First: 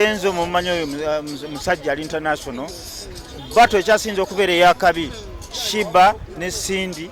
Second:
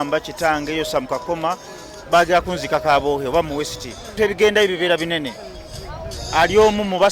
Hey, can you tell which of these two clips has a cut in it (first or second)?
second